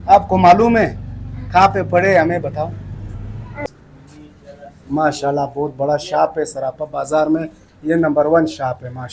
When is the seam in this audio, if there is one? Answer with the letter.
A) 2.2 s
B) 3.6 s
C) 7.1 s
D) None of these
B